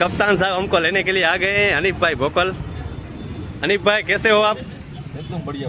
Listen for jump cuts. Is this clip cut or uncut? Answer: uncut